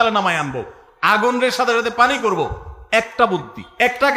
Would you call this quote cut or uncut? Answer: uncut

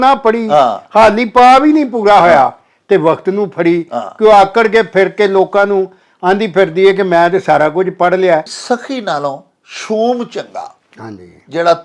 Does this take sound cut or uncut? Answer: cut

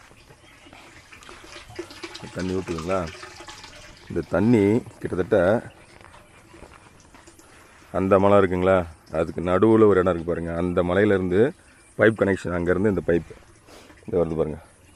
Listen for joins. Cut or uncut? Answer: uncut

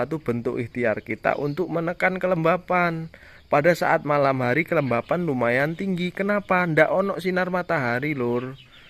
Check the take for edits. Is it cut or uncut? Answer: uncut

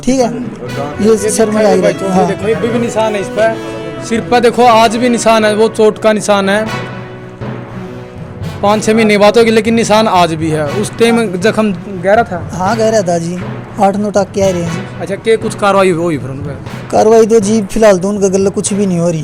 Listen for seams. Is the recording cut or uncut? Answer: uncut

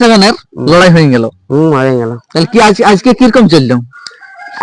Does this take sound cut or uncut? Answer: uncut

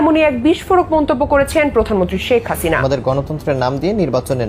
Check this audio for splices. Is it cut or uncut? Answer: cut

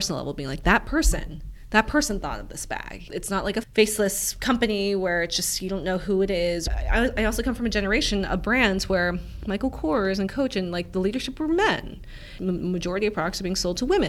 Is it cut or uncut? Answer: cut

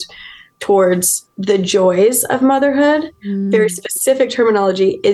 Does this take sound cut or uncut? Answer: uncut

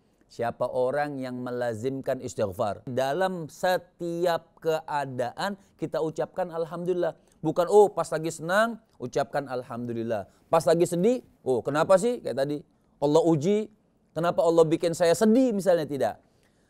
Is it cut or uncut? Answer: cut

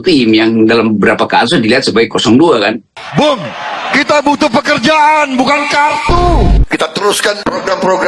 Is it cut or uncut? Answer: cut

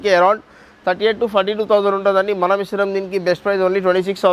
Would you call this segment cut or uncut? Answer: uncut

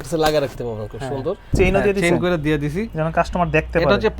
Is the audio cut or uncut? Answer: cut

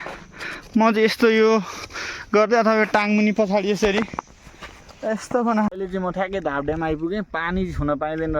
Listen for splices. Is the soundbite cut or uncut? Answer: cut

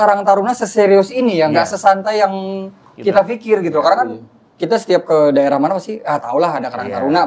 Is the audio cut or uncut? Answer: uncut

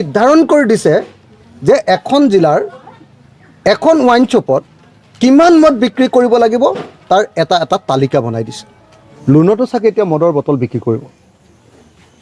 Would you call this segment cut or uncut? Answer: cut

